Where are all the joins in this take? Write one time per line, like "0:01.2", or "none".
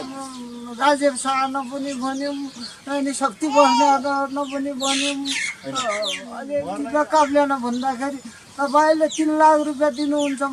0:06.4